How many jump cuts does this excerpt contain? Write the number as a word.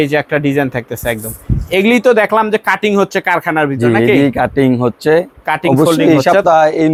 zero